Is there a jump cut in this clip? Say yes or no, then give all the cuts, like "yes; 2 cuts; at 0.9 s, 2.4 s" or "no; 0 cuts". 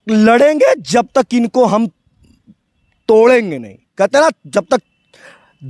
no; 0 cuts